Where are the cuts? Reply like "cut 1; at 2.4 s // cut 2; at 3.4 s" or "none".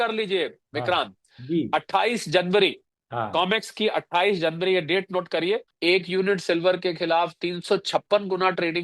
cut 1; at 5.7 s